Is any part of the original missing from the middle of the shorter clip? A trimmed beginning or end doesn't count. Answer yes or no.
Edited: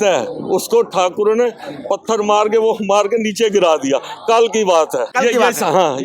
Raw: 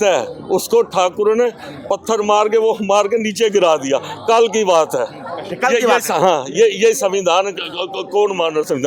yes